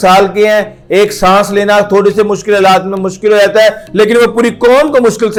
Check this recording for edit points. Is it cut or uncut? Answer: uncut